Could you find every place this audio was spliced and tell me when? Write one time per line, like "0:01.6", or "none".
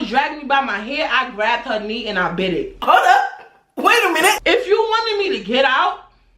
0:04.4